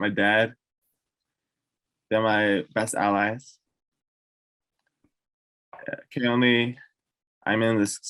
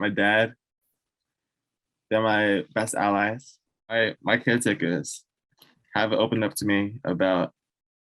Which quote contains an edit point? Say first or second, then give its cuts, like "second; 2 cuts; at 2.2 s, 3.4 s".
second; 1 cut; at 3.9 s